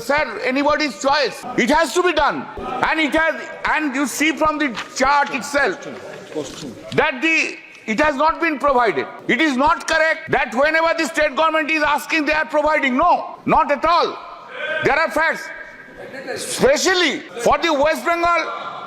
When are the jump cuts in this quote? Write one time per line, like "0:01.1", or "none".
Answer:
0:01.4
0:02.5
0:09.1
0:10.2
0:13.3
0:17.2